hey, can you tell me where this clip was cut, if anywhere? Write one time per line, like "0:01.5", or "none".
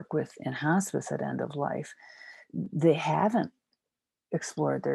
none